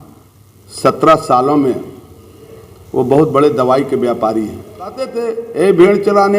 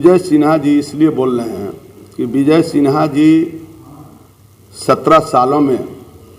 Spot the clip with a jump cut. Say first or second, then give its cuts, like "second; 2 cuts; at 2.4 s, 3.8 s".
first; 1 cut; at 5.1 s